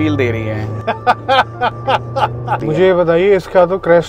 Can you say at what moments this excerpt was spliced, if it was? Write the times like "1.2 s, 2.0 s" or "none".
2.6 s